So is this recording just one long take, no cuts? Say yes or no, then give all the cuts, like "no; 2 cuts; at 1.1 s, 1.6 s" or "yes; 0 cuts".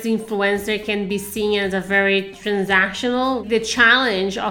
no; 1 cut; at 3.4 s